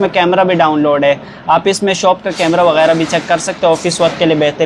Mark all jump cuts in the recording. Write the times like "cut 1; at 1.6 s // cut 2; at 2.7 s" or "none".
none